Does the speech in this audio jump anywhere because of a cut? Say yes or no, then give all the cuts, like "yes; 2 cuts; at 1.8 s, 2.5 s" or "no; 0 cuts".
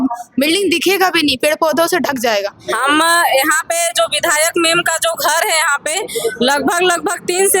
yes; 1 cut; at 2.6 s